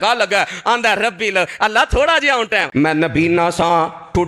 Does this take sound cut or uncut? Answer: cut